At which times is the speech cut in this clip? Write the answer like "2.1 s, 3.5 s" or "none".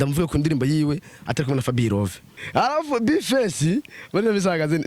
2.3 s